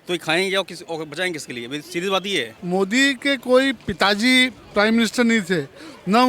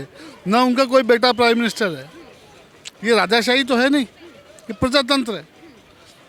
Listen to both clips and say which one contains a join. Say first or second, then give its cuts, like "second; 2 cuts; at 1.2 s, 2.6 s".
first; 1 cut; at 2.5 s